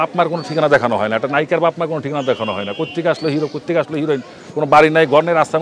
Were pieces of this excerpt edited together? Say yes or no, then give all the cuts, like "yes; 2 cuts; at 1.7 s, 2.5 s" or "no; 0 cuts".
no; 0 cuts